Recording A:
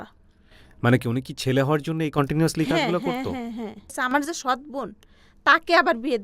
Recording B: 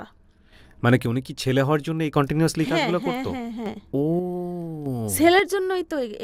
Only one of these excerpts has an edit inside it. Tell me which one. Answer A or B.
A